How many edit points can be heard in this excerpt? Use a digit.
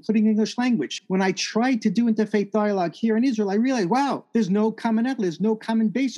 2